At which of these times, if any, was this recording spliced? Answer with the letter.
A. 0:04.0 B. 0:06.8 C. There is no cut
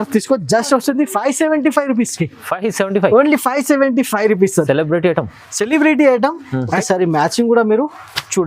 B